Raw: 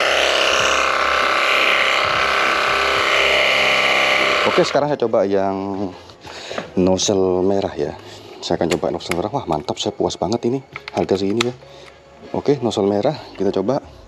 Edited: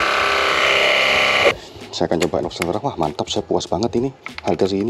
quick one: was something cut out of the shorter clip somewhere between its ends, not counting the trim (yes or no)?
yes